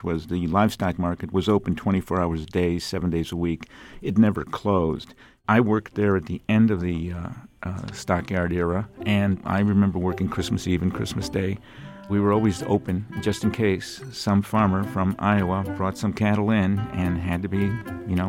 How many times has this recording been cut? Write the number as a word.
three